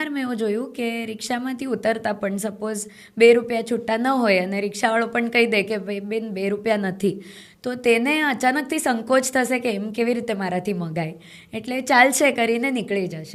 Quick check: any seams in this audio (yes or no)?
no